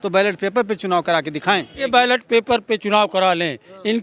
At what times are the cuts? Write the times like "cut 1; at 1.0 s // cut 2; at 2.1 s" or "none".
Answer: cut 1; at 1.9 s

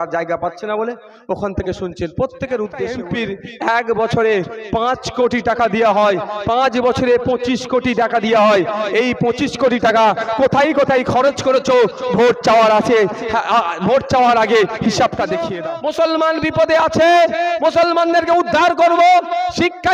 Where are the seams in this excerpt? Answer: cut 1; at 3.0 s // cut 2; at 15.5 s

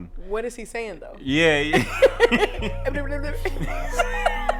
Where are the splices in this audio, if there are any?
none

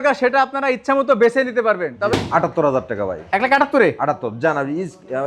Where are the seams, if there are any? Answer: cut 1; at 2.1 s

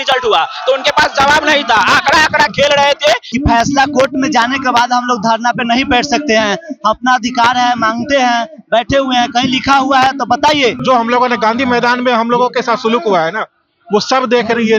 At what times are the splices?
cut 1; at 3.3 s // cut 2; at 10.8 s

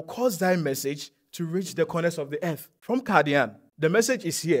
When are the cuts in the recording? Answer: cut 1; at 2.7 s // cut 2; at 3.6 s

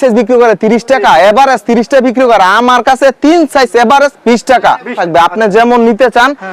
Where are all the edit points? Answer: cut 1; at 5.0 s

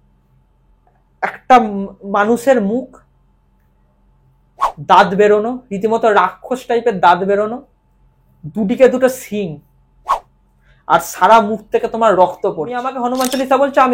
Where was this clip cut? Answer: cut 1; at 12.9 s

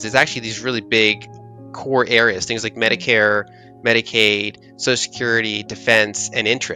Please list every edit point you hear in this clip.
none

